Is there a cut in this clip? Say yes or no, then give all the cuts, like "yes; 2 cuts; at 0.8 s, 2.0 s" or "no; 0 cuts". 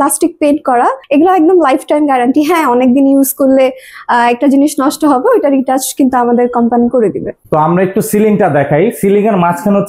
no; 0 cuts